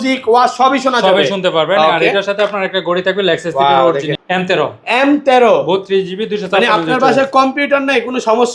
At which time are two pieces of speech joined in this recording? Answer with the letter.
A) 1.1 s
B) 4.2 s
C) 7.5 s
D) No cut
B